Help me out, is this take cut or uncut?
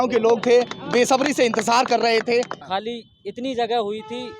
cut